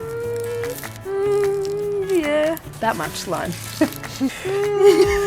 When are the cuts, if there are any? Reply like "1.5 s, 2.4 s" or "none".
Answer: 0.9 s, 2.7 s, 4.4 s